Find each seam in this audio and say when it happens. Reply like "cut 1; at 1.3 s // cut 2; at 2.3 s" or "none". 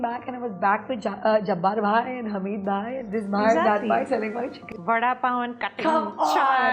cut 1; at 4.6 s